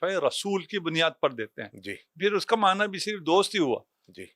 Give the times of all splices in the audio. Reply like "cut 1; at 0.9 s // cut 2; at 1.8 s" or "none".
cut 1; at 2.1 s